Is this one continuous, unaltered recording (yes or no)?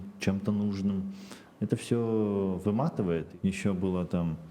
no